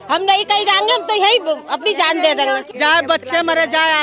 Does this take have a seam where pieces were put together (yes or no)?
yes